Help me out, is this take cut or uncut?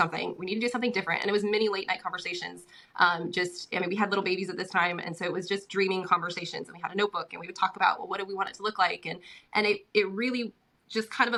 uncut